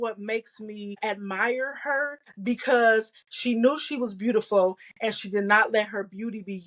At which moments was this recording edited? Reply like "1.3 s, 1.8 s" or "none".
1.0 s, 2.2 s